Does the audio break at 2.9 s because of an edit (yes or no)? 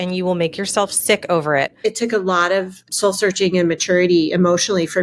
yes